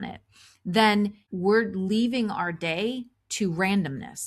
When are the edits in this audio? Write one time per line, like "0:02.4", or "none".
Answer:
0:01.3